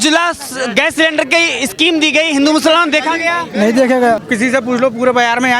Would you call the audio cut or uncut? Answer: cut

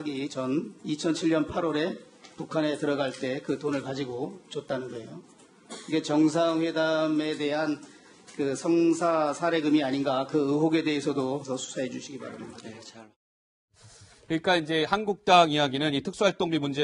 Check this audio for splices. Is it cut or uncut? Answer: cut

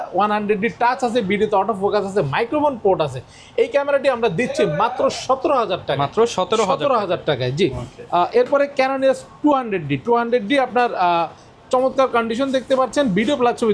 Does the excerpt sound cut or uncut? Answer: uncut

